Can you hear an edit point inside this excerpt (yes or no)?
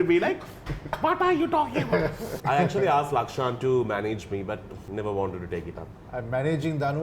yes